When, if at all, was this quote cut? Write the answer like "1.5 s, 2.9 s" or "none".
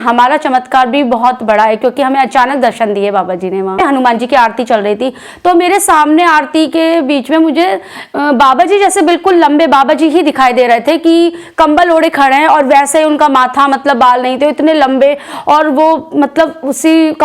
3.8 s